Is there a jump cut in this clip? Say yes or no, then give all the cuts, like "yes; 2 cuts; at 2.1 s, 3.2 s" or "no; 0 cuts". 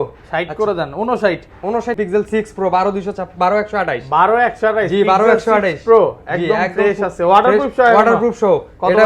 yes; 1 cut; at 2.0 s